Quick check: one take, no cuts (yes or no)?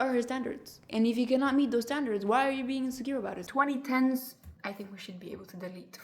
no